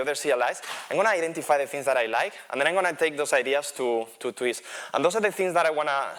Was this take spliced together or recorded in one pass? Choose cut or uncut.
uncut